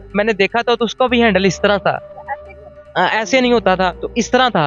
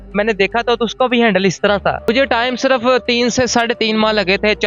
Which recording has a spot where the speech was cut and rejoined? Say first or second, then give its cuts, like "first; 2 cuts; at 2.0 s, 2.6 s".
second; 1 cut; at 2.1 s